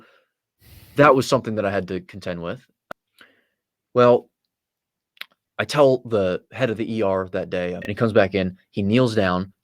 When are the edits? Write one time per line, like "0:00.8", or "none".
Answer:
0:02.8
0:07.8